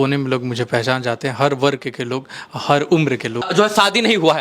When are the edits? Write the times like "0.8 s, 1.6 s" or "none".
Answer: 3.5 s